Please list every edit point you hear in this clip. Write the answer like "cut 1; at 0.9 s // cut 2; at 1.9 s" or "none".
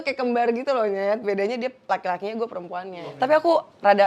cut 1; at 3.0 s